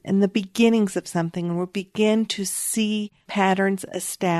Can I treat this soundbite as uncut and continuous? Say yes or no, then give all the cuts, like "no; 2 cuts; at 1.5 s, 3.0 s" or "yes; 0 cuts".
no; 1 cut; at 3.2 s